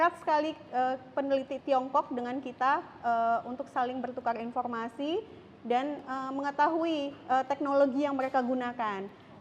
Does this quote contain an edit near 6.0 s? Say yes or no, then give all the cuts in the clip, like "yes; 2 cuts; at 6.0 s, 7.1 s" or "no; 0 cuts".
yes; 1 cut; at 6.0 s